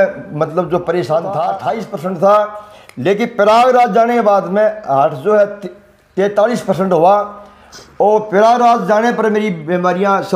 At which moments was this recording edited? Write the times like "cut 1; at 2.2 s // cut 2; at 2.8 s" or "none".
cut 1; at 1.7 s

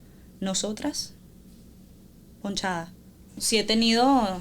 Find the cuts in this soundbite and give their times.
cut 1; at 3.4 s

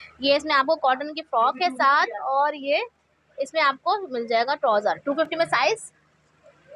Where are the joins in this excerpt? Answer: none

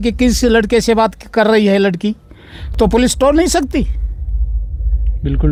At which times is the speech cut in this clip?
none

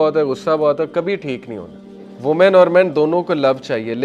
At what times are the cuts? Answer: cut 1; at 2.1 s

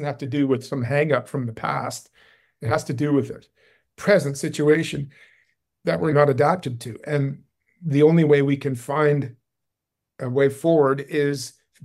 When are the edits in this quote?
cut 1; at 6.1 s

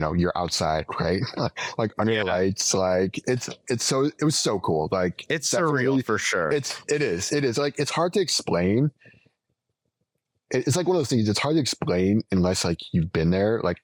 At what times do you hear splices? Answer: none

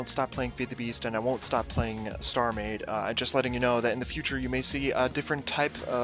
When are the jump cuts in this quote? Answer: cut 1; at 1.5 s

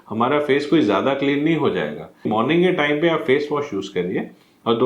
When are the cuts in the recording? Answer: cut 1; at 2.3 s

